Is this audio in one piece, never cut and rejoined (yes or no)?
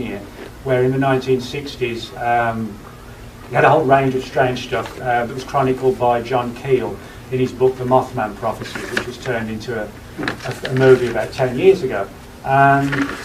yes